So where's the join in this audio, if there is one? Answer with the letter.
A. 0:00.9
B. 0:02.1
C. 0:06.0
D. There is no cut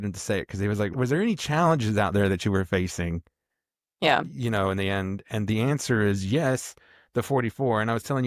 A